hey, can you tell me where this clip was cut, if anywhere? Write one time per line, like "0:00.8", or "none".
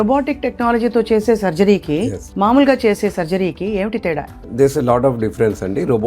0:04.3